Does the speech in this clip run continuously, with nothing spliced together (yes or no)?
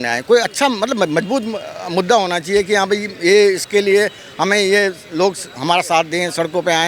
yes